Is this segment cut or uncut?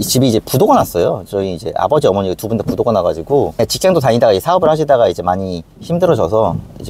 cut